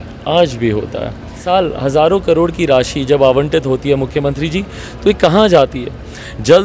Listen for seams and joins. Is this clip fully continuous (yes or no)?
no